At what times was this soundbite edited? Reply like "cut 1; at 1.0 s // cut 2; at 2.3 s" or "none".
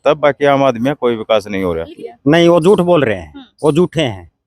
cut 1; at 1.9 s